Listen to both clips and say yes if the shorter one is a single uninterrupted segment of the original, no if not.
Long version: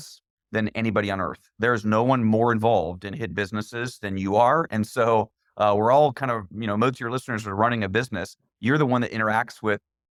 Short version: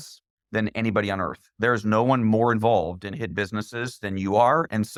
yes